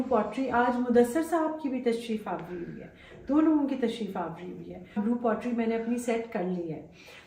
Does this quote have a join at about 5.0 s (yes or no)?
yes